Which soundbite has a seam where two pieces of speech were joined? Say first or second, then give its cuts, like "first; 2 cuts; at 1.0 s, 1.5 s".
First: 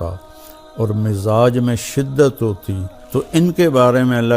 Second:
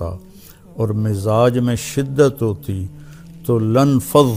first; 1 cut; at 3.4 s